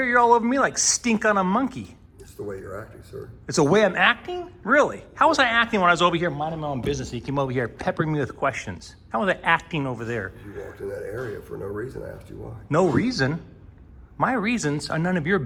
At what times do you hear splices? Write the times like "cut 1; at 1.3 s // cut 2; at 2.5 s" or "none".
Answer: none